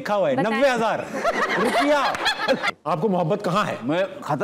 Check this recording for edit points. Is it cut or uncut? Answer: cut